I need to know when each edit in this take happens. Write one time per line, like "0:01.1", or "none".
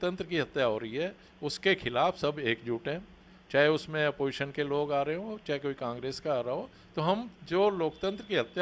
none